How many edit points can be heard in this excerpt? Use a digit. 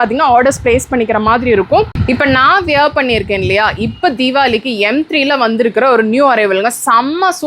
1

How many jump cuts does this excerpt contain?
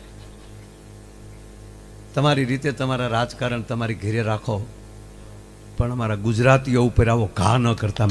0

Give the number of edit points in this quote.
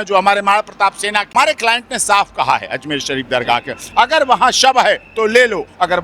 1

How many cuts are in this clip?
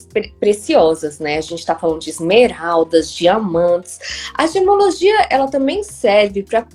0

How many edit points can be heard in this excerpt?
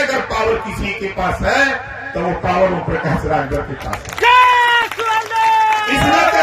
0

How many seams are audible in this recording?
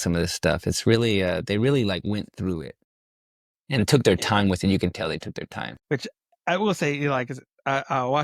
0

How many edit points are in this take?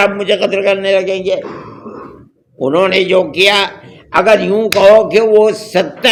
0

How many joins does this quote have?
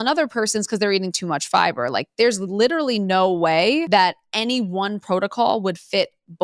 1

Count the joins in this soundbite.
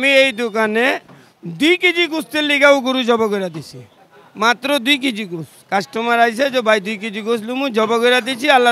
0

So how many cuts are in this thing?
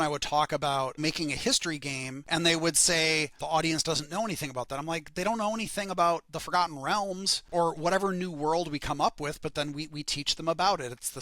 4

